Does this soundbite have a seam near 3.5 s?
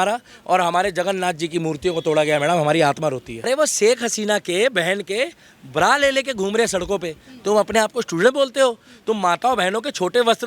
yes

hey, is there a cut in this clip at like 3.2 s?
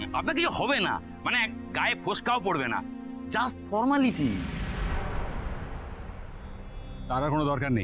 no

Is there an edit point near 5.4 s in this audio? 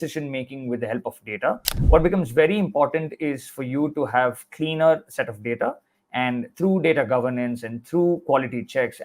no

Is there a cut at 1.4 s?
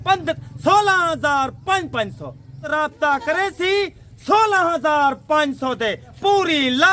no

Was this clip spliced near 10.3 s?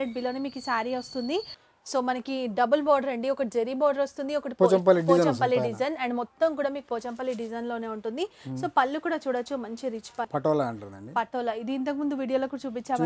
yes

